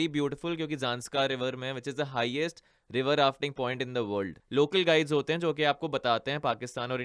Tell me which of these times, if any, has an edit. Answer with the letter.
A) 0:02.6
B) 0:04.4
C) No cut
B